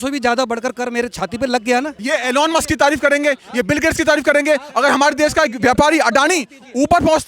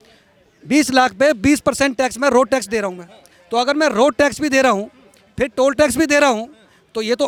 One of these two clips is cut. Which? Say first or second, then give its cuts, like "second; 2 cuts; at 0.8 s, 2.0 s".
first; 1 cut; at 2.0 s